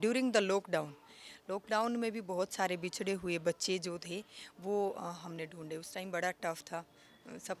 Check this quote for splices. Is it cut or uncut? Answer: uncut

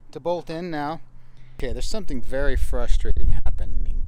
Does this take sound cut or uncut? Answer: cut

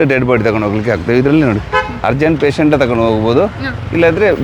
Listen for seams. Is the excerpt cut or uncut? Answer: uncut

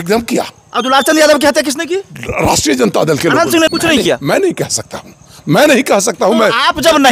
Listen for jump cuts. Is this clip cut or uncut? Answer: cut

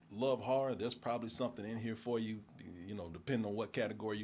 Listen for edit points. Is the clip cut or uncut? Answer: uncut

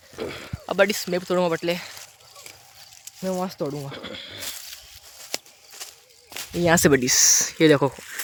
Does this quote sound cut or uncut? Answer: uncut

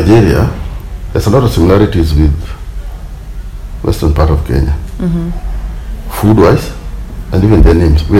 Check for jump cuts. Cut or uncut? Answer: uncut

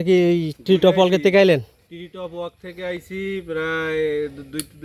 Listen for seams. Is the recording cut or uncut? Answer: uncut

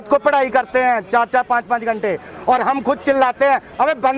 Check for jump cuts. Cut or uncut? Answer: uncut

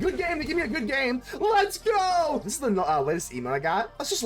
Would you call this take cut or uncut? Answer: cut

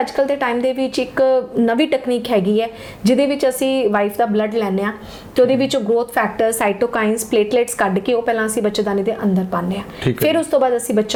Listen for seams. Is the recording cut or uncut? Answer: uncut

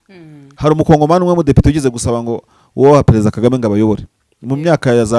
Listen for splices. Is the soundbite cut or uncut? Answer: uncut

